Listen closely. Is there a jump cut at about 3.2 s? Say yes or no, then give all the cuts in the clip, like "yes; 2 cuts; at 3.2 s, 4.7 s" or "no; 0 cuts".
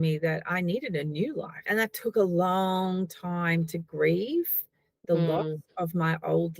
no; 1 cut; at 1.6 s